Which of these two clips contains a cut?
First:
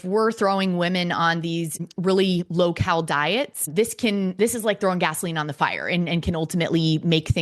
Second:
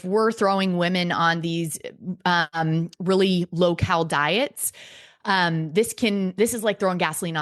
first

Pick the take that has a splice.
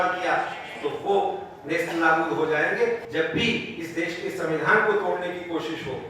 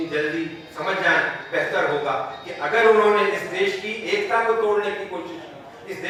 first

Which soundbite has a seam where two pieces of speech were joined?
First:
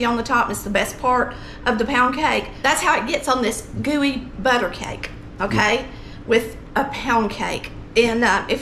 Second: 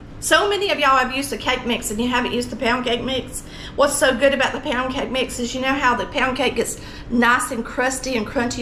first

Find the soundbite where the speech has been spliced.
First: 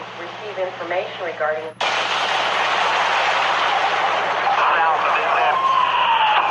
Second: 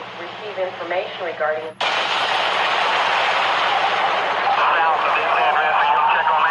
first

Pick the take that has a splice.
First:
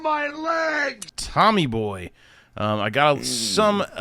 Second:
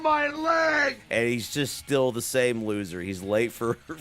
second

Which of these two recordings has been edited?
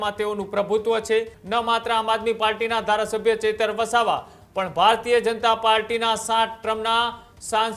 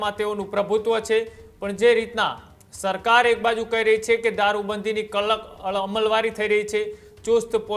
first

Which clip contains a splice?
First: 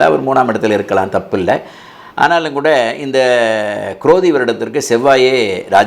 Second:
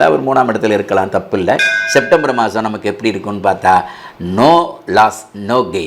second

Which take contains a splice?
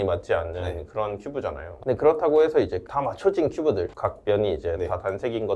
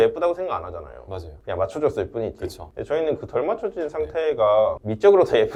first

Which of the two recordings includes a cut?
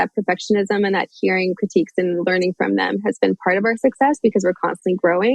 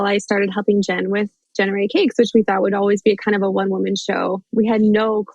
second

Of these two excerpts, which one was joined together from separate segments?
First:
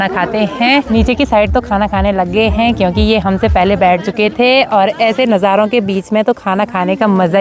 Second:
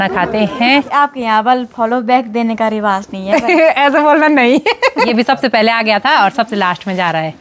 second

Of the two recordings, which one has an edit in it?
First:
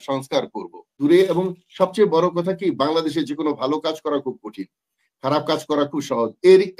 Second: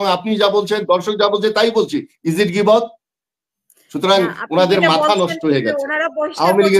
first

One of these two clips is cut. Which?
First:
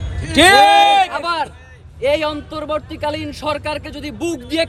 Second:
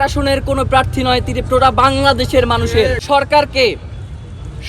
second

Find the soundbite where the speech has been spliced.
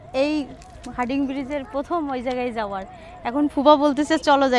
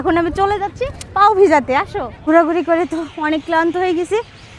second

